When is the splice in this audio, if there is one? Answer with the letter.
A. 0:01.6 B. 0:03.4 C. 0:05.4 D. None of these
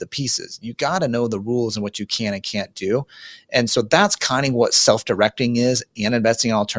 D